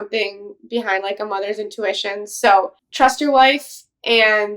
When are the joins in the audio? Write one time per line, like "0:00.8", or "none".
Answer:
0:02.8